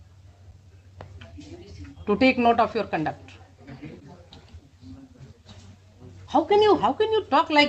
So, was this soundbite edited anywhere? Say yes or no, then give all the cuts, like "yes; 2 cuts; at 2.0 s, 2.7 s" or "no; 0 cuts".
no; 0 cuts